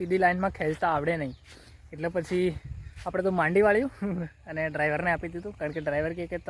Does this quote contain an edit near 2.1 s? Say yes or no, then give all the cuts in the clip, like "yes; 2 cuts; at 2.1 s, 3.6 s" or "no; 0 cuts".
no; 0 cuts